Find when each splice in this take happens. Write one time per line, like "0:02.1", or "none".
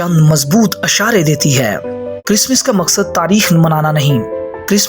0:02.2